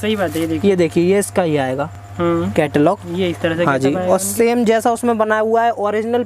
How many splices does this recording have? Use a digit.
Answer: 0